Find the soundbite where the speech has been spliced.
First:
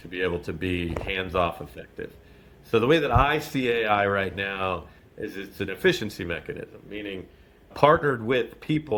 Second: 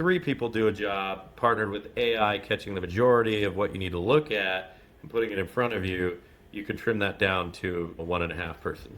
second; 1 cut; at 8.0 s

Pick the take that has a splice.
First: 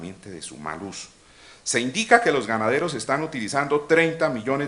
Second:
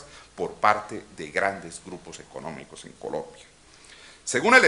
second; 1 cut; at 1.6 s

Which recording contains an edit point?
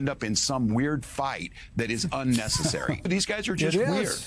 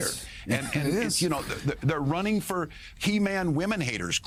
first; 1 cut; at 3.1 s

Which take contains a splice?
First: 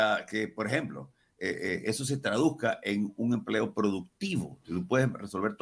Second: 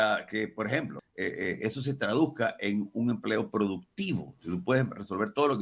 second; 1 cut; at 1.0 s

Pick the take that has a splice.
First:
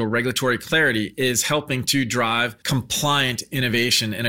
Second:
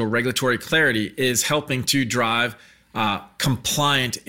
first; 1 cut; at 2.6 s

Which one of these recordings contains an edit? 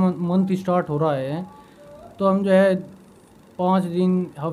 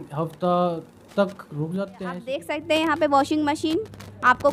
second; 1 cut; at 1.8 s

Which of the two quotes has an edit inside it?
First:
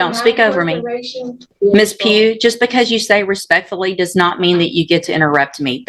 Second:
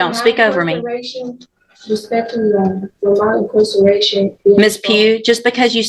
first; 1 cut; at 1.5 s

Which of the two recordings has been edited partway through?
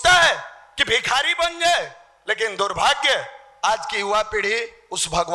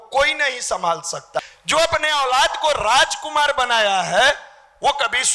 second; 1 cut; at 1.4 s

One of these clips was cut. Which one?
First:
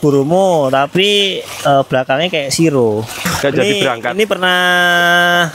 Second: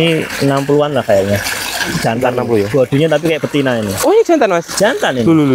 first; 1 cut; at 3.2 s

